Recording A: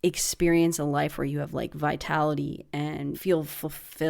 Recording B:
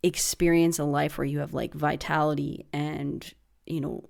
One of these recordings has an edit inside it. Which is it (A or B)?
A